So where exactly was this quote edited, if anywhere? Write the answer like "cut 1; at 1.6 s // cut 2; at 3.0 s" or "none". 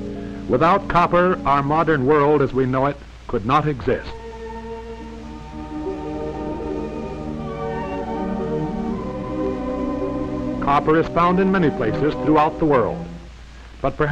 cut 1; at 3.3 s